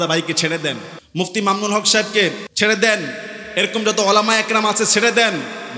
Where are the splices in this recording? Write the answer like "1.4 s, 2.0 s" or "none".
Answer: 1.0 s, 2.5 s